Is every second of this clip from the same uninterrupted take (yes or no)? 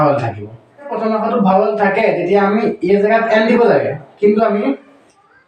no